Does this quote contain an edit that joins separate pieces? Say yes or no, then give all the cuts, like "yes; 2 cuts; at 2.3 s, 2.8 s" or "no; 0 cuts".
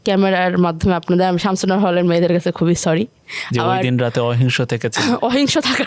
no; 0 cuts